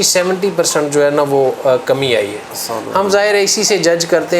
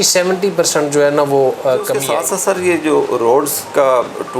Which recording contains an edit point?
second; 1 cut; at 2.0 s

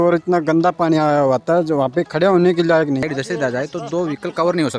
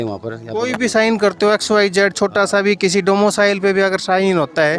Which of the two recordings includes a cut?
first; 1 cut; at 3.0 s

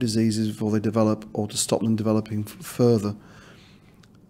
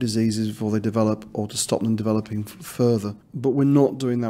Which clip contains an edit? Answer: second; 1 cut; at 3.2 s

